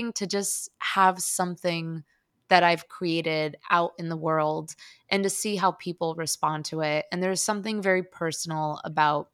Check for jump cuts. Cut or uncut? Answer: uncut